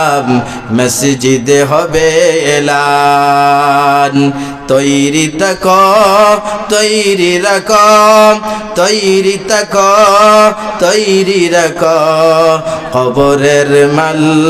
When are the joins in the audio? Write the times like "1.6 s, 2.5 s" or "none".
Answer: none